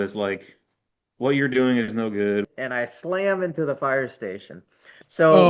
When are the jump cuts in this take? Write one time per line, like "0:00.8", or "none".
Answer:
0:02.5